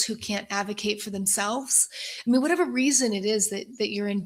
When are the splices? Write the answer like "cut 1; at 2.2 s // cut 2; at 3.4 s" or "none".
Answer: none

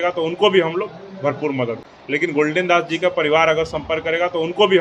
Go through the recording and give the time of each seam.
cut 1; at 2.2 s

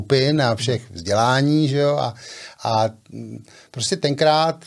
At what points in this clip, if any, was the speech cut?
none

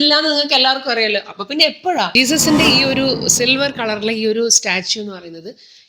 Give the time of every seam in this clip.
cut 1; at 2.1 s

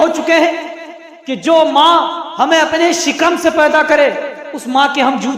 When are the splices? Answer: none

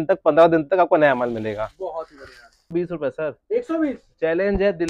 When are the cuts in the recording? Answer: cut 1; at 2.7 s

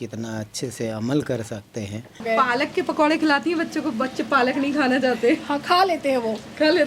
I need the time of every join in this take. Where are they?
cut 1; at 2.2 s

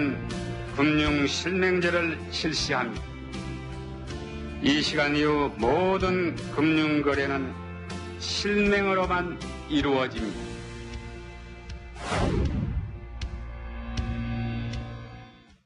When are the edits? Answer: none

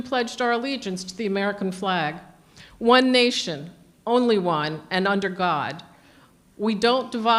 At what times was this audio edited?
none

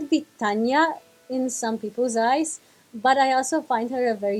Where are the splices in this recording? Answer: none

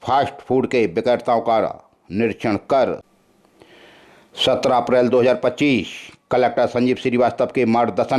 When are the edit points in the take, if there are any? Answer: cut 1; at 3.0 s

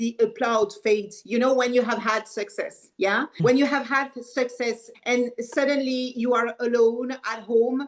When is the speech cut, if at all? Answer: cut 1; at 3.4 s // cut 2; at 4.9 s

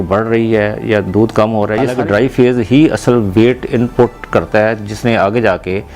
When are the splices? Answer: cut 1; at 1.9 s

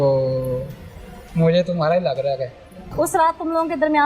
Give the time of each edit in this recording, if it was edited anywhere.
cut 1; at 2.8 s

